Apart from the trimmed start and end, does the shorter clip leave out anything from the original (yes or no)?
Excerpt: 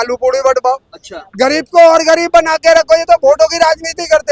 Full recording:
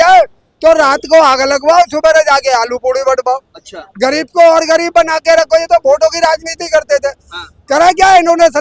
no